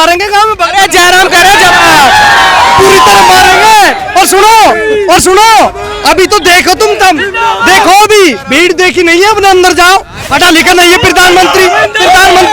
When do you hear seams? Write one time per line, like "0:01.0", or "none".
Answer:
0:10.3